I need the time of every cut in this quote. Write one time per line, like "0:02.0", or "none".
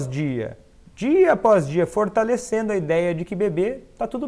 none